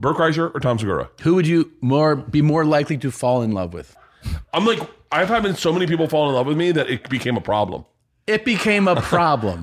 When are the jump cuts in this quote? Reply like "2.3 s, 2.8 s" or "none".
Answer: 1.1 s, 3.8 s